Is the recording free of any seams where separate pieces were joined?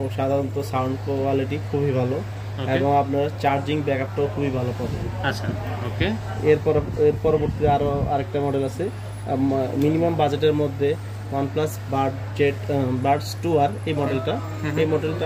yes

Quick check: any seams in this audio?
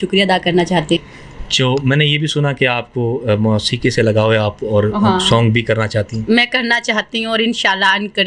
yes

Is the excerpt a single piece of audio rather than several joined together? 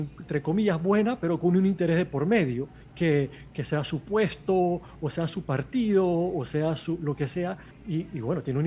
no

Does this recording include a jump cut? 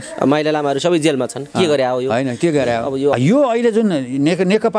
yes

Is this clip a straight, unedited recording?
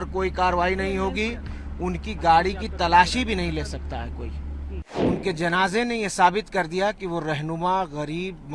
no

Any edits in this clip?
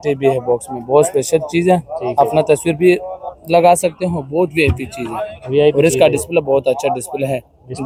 no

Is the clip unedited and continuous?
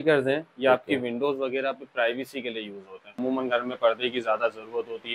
no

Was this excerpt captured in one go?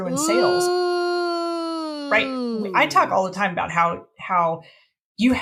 yes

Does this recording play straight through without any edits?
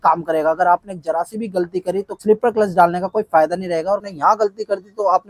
no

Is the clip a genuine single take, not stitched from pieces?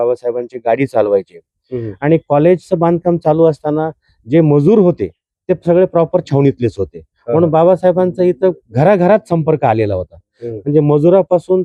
yes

